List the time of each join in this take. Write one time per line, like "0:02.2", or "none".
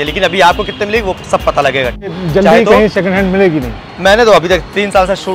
0:02.1